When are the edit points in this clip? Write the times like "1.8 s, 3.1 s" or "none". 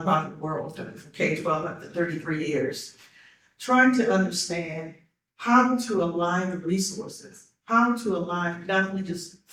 none